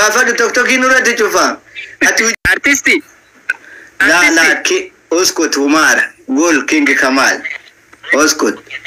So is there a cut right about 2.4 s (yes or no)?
yes